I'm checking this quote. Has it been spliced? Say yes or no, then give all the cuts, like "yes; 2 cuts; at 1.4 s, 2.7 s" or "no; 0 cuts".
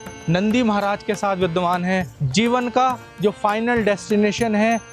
yes; 1 cut; at 2.2 s